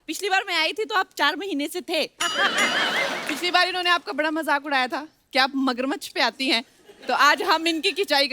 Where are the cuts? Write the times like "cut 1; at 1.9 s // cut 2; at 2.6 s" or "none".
cut 1; at 3.3 s